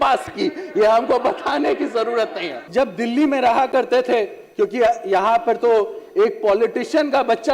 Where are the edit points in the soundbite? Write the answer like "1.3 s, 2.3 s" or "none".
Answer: 2.5 s